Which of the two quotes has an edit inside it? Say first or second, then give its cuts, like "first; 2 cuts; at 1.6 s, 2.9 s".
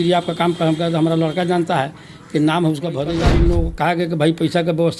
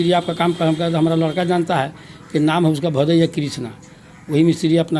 first; 1 cut; at 3.2 s